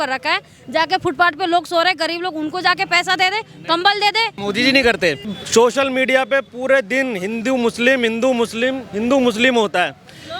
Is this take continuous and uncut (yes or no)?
no